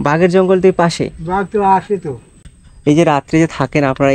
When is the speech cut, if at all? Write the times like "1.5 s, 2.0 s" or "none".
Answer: 2.4 s